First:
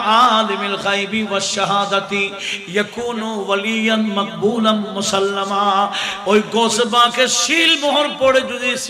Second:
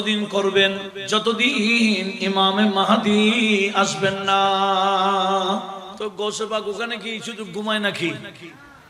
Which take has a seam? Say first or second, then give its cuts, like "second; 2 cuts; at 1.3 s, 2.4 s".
second; 2 cuts; at 0.9 s, 5.9 s